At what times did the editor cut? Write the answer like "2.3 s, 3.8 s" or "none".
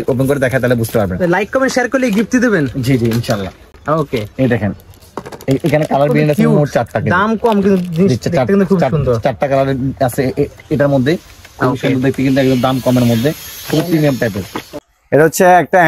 none